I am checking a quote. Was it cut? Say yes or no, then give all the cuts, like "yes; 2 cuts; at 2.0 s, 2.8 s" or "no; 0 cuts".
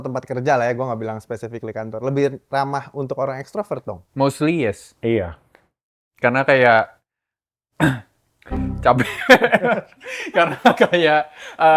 no; 0 cuts